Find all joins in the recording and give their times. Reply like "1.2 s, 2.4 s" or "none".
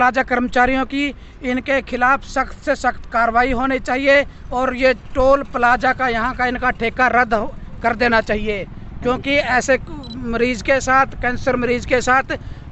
none

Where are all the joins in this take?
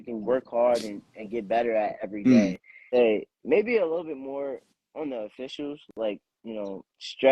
2.9 s

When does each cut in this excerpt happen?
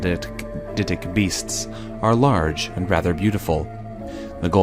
3.4 s

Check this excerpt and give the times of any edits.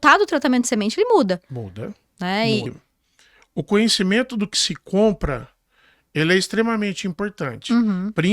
2.7 s

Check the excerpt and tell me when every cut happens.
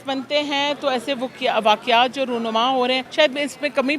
3.1 s

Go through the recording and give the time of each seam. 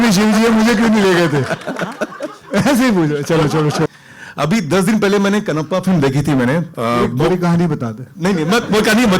3.9 s

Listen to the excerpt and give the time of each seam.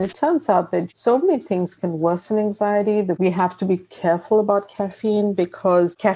0.9 s, 3.2 s

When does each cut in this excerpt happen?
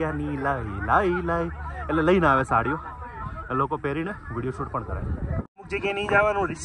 5.6 s

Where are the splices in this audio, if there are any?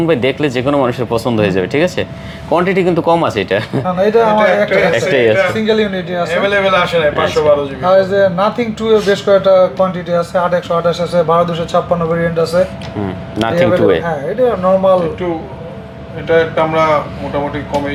none

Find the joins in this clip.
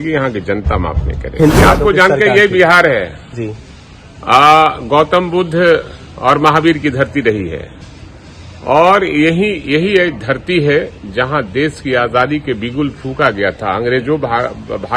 1.6 s

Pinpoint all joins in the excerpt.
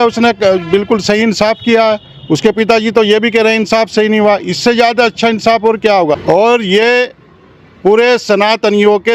6.2 s

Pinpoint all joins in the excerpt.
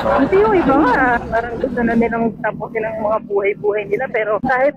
none

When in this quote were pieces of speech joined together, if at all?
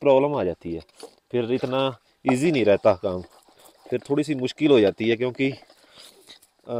none

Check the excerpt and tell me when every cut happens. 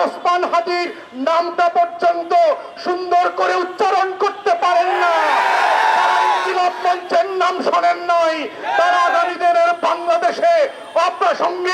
none

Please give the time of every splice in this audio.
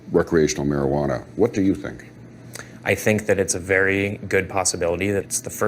none

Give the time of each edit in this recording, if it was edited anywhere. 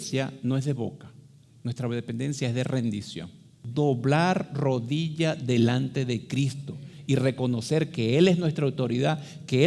3.5 s

